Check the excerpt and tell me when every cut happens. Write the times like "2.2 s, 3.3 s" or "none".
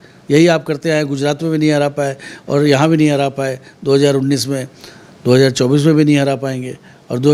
none